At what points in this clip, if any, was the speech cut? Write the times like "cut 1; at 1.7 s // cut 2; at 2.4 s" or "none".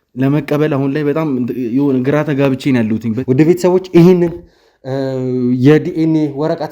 cut 1; at 3.1 s